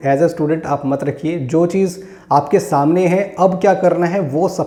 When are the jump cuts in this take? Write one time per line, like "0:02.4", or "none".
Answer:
none